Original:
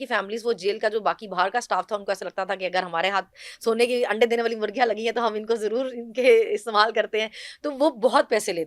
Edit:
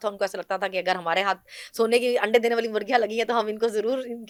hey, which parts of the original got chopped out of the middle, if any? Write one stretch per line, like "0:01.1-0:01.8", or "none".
none